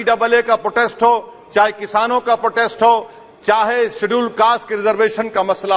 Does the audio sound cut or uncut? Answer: uncut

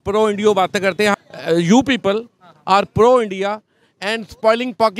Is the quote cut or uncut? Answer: cut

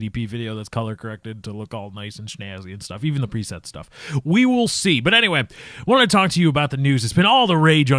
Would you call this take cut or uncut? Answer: cut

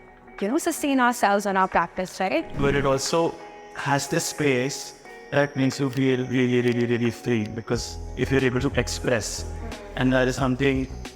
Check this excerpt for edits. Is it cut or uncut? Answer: cut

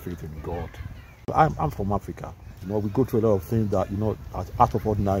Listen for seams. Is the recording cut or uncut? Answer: cut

